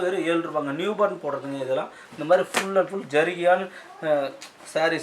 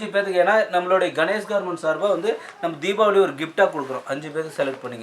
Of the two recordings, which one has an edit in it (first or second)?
first